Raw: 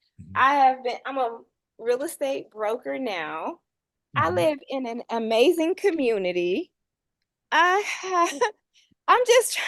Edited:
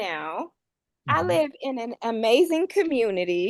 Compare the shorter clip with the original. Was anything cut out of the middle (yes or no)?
no